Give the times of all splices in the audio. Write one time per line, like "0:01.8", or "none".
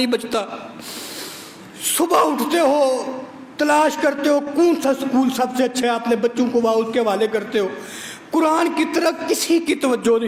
none